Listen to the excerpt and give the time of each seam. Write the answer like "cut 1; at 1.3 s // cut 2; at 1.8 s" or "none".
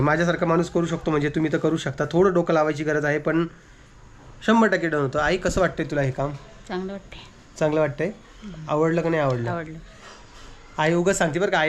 none